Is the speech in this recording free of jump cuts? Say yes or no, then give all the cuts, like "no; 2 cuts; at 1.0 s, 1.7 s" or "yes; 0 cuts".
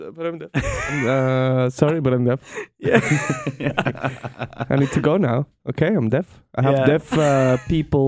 yes; 0 cuts